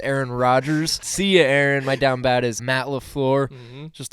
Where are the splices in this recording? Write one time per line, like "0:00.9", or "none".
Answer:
0:01.0
0:02.6